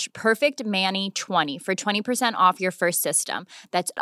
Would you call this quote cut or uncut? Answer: cut